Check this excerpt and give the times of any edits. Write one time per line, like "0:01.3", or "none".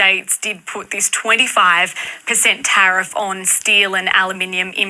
none